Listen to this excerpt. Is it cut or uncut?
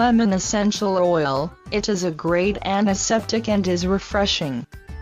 uncut